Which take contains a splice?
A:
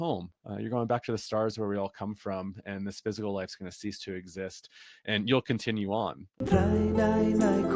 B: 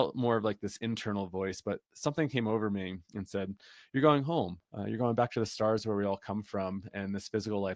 A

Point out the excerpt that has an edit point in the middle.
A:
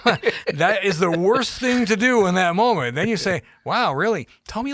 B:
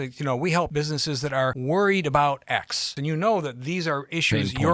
B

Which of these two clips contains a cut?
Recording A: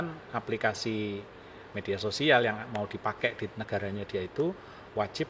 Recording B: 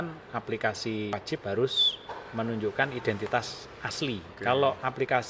B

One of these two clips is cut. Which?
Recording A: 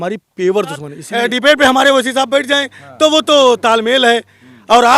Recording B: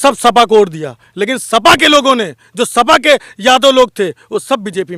A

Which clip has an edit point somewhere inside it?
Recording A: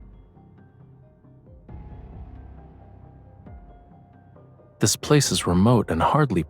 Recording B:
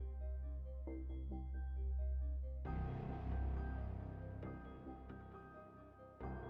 A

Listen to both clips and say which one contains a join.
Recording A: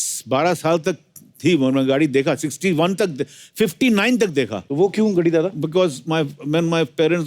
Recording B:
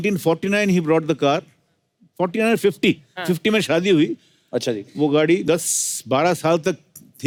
A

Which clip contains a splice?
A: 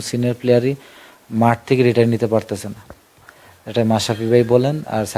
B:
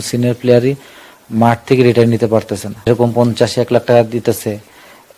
B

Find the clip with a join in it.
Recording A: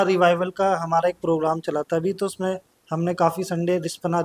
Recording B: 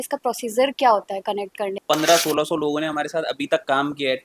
B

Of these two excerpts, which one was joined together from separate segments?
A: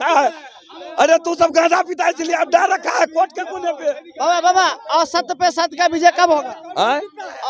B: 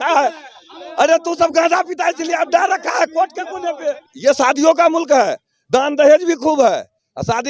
B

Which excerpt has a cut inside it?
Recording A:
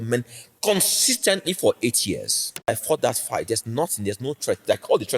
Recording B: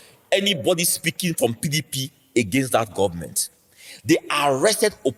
A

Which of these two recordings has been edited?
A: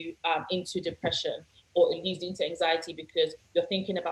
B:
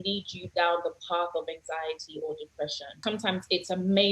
B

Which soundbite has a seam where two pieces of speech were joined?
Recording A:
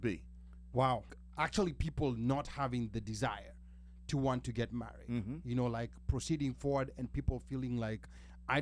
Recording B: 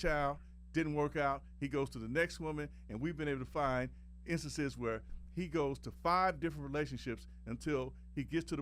A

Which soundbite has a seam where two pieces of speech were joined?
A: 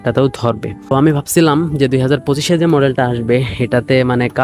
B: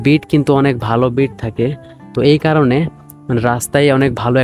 A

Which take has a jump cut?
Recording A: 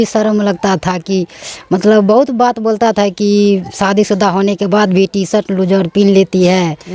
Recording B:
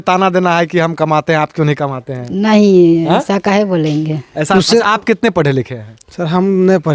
B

